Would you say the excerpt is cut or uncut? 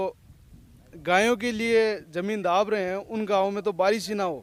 uncut